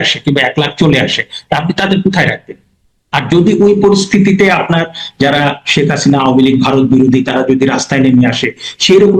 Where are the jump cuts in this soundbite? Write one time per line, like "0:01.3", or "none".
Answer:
none